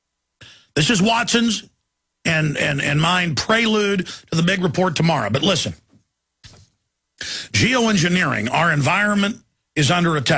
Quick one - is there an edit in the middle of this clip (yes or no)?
yes